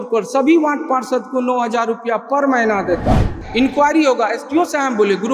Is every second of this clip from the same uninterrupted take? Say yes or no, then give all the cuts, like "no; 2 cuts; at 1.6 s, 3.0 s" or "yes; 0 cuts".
no; 1 cut; at 3.4 s